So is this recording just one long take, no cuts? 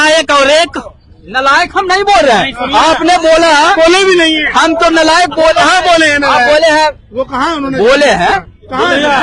yes; 0 cuts

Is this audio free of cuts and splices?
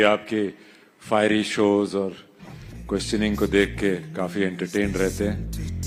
yes; 0 cuts

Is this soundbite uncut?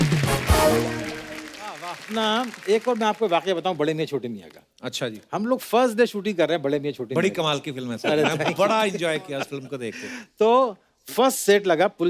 no; 1 cut; at 1.9 s

